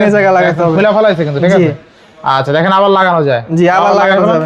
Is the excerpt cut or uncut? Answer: uncut